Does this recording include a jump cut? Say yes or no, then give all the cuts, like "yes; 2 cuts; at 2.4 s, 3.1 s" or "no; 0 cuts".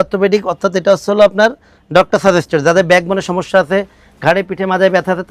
no; 0 cuts